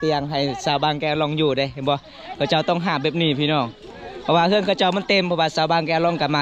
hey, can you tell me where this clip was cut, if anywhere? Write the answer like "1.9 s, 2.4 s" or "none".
none